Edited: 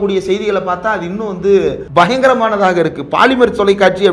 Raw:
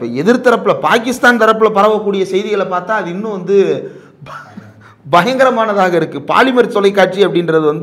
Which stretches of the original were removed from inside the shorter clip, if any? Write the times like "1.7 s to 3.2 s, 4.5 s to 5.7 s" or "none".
3.9 s to 5.0 s